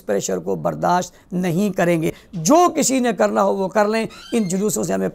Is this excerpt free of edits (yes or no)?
no